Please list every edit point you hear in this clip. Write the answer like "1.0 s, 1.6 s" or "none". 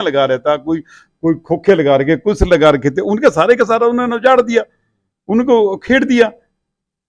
none